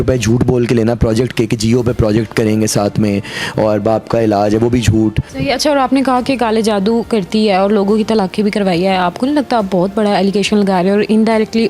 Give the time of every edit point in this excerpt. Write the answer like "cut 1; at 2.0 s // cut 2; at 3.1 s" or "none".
cut 1; at 5.3 s